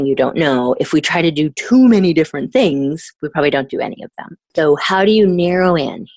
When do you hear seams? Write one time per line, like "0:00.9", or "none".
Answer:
0:04.4